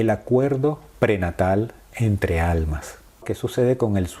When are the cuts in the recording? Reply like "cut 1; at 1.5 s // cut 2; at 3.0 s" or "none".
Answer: cut 1; at 3.3 s

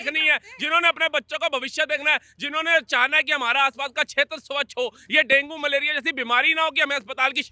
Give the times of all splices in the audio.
none

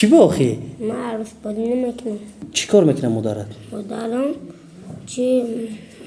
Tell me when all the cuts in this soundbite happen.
cut 1; at 2.4 s

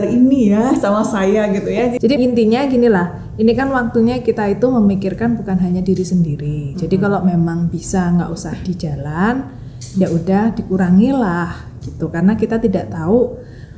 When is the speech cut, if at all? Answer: cut 1; at 2.0 s

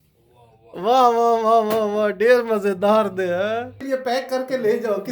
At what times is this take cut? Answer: cut 1; at 3.8 s

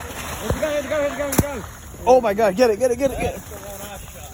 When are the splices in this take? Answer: none

